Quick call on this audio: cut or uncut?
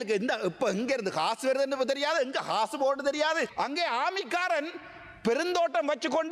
cut